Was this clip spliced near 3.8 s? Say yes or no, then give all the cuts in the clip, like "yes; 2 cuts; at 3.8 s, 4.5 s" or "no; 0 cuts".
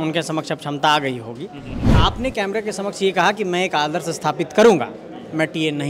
no; 1 cut; at 2.0 s